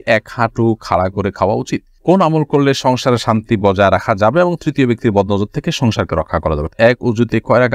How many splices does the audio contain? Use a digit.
2